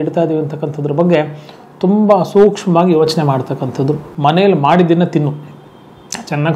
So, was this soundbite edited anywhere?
yes; 1 cut; at 4.1 s

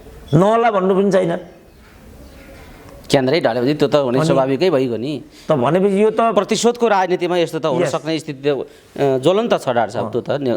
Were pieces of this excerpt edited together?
no; 0 cuts

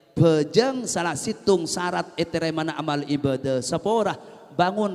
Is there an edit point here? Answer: no; 0 cuts

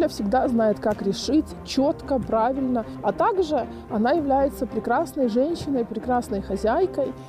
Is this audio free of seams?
no; 1 cut; at 3.0 s

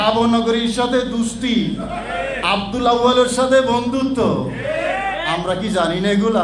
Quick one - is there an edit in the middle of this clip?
yes; 2 cuts; at 2.2 s, 5.2 s

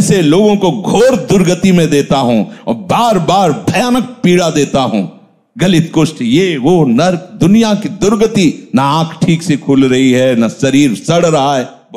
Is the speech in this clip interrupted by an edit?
no; 0 cuts

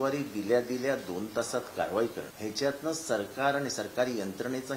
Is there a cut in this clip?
yes; 1 cut; at 2.3 s

